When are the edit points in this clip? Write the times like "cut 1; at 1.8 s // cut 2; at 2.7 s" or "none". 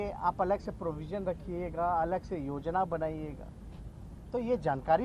none